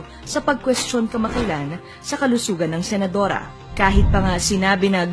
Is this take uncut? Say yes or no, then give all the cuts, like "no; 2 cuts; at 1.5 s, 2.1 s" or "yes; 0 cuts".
no; 1 cut; at 2.9 s